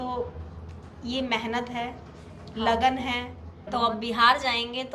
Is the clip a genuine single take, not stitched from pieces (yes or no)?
no